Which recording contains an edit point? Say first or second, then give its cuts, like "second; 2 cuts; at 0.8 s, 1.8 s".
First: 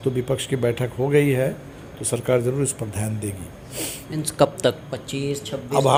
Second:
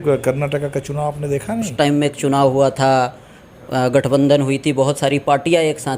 second; 1 cut; at 1.7 s